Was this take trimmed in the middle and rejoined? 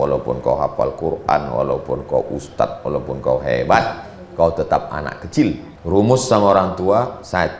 yes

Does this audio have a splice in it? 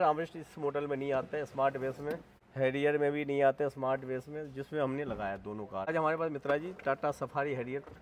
yes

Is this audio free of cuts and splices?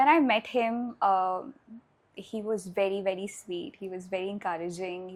yes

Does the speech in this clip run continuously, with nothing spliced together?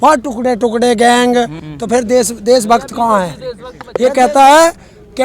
no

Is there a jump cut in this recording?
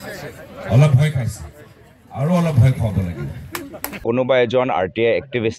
yes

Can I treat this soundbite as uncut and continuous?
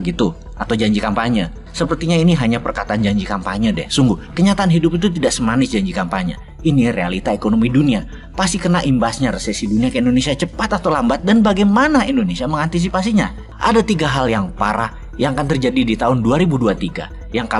no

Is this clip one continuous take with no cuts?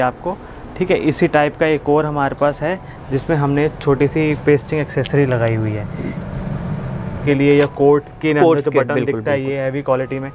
no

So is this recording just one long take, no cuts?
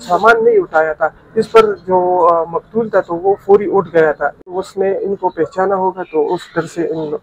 no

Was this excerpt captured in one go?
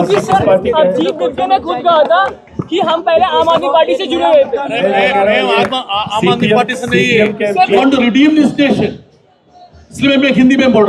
no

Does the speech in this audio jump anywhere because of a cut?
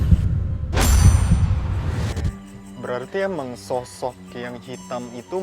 yes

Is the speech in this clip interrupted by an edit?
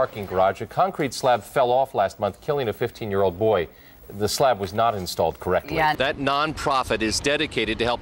yes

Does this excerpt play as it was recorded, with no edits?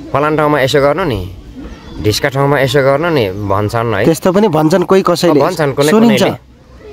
yes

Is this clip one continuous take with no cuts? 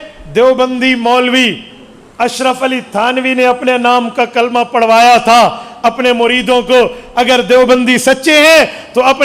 yes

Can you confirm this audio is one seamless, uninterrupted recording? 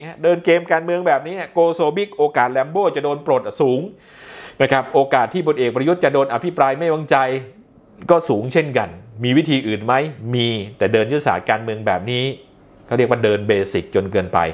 yes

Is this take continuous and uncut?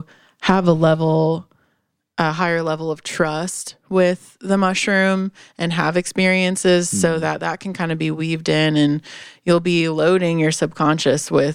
yes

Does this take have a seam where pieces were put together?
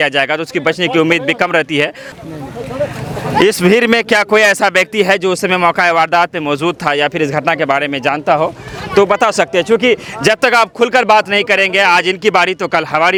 no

